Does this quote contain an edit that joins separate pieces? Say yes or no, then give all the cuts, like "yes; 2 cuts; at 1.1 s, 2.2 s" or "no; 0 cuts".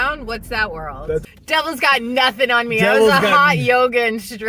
yes; 1 cut; at 1.2 s